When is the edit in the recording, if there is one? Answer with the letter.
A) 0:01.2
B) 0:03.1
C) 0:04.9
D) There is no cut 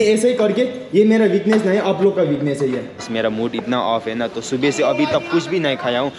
B